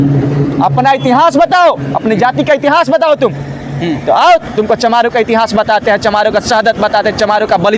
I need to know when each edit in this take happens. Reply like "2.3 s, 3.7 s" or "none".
none